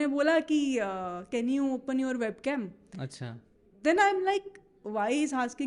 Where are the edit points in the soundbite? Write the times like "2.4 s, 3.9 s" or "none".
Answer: none